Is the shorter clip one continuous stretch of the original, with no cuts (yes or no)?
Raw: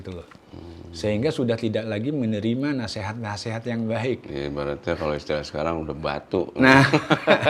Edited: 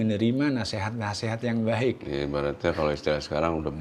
yes